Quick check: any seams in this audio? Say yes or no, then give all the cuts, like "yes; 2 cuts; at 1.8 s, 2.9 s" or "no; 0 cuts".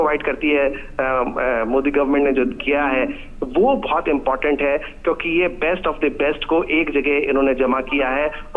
yes; 1 cut; at 7.1 s